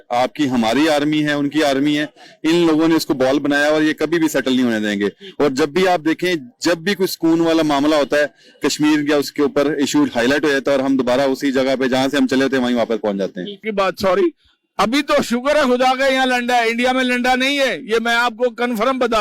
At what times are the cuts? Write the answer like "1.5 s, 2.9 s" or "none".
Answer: 13.7 s